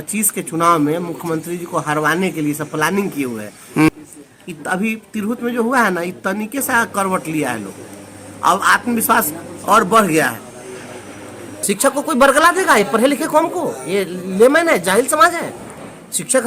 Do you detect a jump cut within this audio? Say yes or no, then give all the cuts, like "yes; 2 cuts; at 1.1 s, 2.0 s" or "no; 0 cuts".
yes; 2 cuts; at 3.9 s, 11.5 s